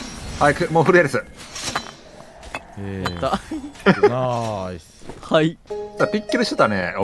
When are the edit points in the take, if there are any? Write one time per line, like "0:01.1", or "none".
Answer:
none